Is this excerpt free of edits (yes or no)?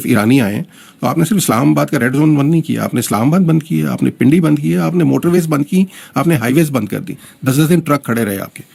yes